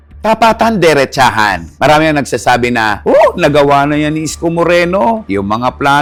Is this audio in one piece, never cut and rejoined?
yes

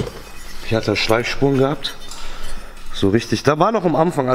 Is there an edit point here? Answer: no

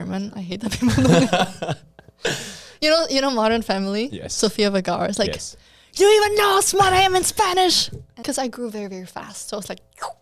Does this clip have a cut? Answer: yes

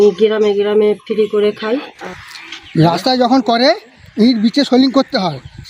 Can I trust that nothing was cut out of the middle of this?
no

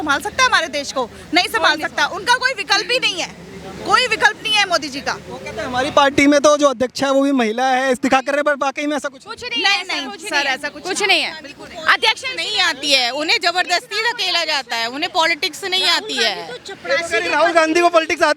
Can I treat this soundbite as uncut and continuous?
yes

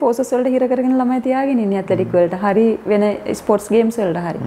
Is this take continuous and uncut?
yes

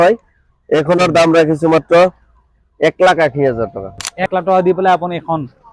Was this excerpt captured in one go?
no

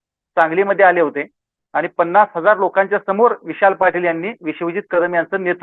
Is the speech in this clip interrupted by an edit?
no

